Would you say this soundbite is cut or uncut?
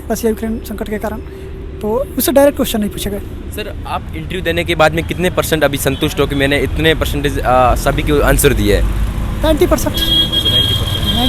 uncut